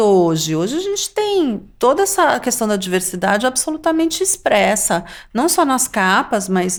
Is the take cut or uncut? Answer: uncut